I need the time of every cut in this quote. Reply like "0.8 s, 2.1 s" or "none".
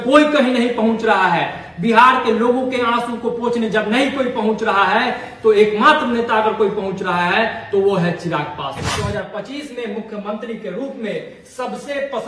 8.9 s